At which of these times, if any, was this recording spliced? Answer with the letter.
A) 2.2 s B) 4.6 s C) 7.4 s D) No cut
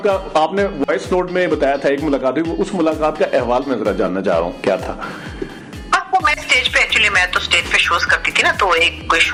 D